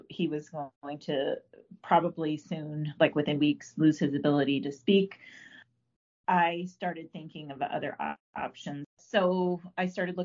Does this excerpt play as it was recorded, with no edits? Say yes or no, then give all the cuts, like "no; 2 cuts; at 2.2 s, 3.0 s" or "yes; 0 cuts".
no; 1 cut; at 9.0 s